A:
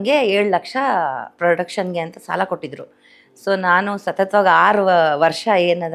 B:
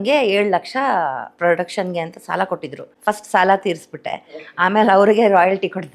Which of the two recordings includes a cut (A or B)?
B